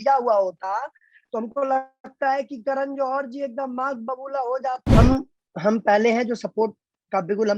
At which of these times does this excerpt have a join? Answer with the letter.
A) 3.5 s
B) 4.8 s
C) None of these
B